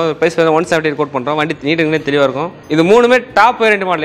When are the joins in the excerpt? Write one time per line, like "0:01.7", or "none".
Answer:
0:02.6